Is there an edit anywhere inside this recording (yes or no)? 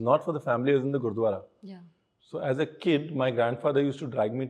no